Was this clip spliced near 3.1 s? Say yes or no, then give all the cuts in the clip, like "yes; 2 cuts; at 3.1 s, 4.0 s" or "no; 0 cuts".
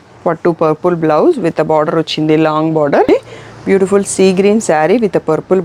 yes; 1 cut; at 3.1 s